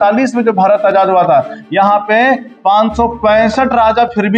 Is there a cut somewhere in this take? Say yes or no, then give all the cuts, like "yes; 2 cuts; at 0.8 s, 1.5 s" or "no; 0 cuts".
no; 0 cuts